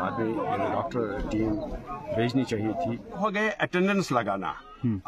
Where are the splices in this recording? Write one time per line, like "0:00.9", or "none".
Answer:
0:03.2